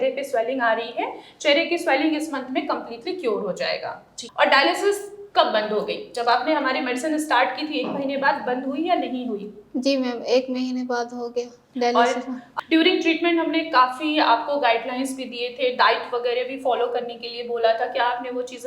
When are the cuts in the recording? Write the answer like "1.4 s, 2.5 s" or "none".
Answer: 4.1 s, 12.5 s

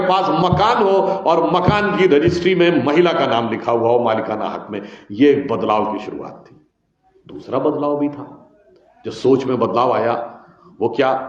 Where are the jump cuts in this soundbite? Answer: none

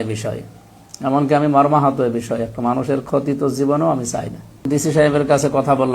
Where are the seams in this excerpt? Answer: 4.6 s

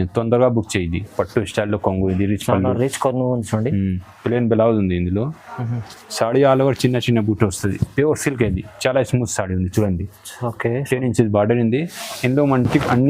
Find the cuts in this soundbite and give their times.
1.1 s

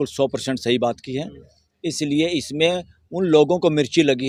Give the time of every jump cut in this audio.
none

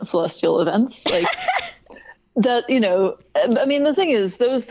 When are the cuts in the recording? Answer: none

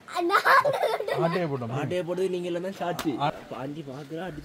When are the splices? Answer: 3.3 s

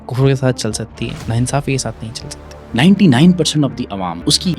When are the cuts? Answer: 1.2 s, 2.6 s

